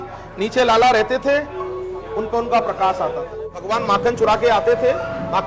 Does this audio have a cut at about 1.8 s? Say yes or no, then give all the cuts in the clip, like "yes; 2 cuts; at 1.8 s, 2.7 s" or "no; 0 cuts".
no; 1 cut; at 3.7 s